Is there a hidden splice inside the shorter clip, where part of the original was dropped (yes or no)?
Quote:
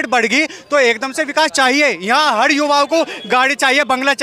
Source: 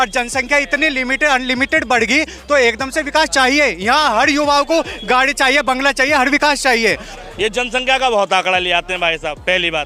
no